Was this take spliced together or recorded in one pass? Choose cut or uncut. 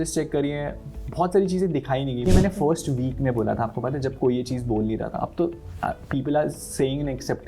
cut